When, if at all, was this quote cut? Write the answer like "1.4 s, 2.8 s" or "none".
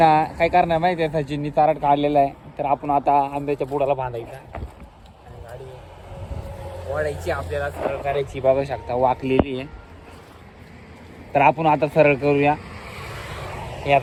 none